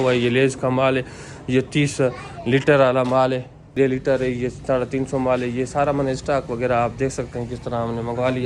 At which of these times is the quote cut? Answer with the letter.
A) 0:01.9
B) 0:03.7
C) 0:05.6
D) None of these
B